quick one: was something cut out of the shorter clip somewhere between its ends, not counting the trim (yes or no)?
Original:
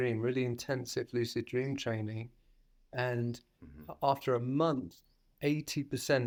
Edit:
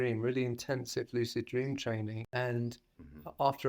yes